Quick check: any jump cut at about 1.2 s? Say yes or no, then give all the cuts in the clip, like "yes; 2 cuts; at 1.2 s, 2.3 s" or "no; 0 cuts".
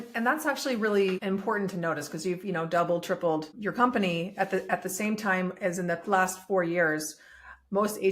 yes; 2 cuts; at 1.2 s, 3.5 s